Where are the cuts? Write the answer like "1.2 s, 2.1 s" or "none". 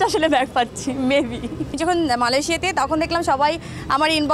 1.8 s